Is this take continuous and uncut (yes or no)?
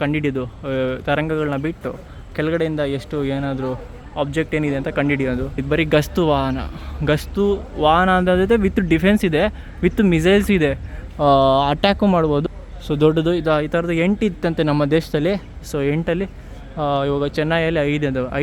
no